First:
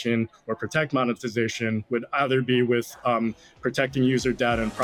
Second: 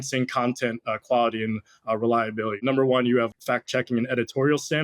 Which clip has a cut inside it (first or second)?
second